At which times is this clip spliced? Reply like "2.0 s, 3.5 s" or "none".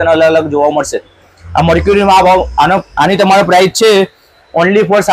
none